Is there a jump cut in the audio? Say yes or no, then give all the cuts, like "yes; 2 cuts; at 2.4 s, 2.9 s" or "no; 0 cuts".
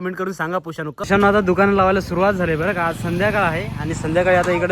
yes; 1 cut; at 1.1 s